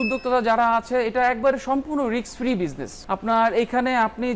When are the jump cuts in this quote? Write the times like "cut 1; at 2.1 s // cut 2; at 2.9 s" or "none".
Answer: cut 1; at 2.9 s